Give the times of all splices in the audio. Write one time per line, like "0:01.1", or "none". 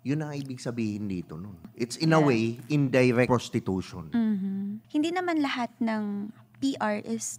0:01.6
0:03.3
0:04.8